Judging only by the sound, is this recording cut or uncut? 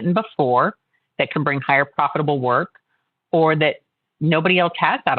cut